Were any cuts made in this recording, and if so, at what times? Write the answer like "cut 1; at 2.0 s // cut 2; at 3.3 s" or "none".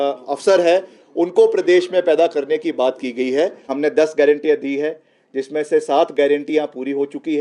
cut 1; at 3.6 s